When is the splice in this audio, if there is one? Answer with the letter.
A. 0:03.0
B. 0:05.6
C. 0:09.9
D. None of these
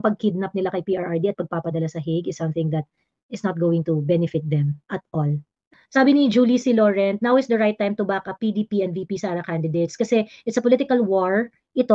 B